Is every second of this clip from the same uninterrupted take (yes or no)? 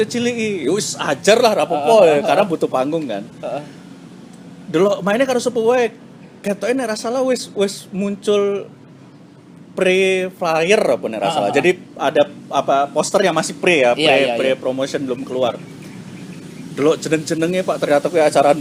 yes